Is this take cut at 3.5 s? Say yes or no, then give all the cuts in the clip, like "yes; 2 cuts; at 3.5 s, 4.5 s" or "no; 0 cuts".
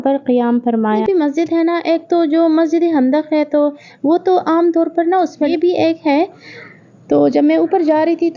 no; 2 cuts; at 1.0 s, 5.5 s